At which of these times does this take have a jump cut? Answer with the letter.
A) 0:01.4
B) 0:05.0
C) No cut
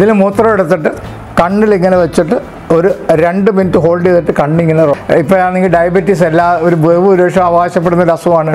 B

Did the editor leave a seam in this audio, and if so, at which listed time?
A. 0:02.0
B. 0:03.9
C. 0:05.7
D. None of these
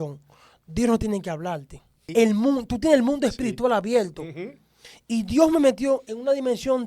A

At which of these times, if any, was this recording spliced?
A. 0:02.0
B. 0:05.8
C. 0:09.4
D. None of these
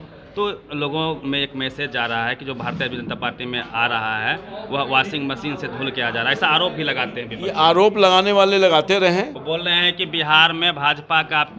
C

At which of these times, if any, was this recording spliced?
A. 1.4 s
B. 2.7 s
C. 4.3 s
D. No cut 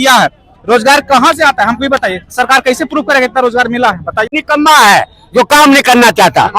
C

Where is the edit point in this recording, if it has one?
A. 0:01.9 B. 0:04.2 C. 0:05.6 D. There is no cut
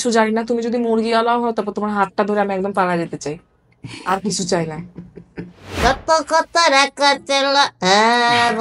C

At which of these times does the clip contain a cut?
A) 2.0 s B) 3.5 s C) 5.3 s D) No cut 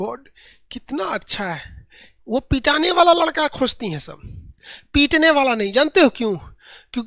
D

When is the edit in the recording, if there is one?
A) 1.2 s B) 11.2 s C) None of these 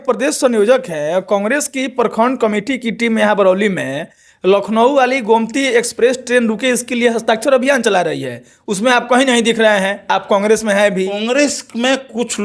B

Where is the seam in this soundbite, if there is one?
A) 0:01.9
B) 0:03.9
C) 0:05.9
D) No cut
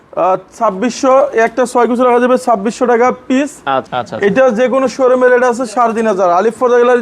B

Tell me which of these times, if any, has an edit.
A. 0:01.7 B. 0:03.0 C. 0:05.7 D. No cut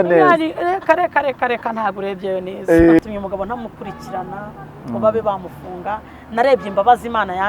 B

